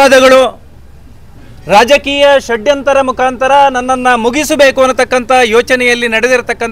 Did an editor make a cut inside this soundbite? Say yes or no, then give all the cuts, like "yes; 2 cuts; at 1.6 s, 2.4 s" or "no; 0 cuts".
no; 0 cuts